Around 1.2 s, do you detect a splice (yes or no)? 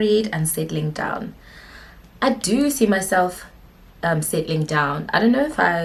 no